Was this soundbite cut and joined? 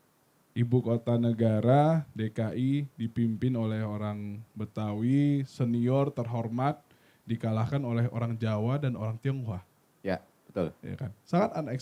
no; 0 cuts

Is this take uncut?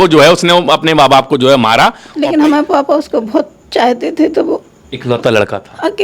no; 1 cut; at 2.1 s

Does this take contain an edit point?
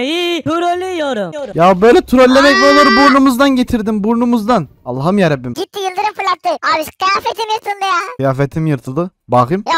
yes; 2 cuts; at 1.3 s, 5.5 s

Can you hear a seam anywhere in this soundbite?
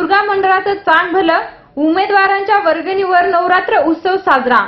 no; 0 cuts

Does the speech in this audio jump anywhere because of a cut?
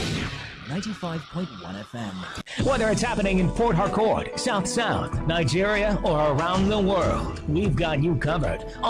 yes; 1 cut; at 2.5 s

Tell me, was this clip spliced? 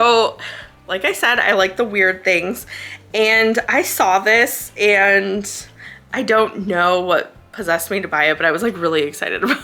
no; 0 cuts

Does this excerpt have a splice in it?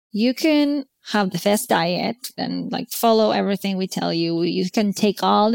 yes; 2 cuts; at 0.9 s, 2.4 s

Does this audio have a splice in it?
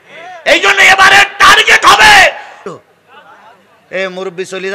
yes; 1 cut; at 2.6 s

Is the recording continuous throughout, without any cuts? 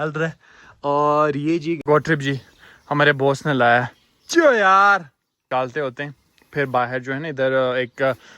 no; 2 cuts; at 1.8 s, 5.4 s

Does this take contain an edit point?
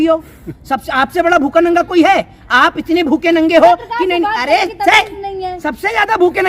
no; 0 cuts

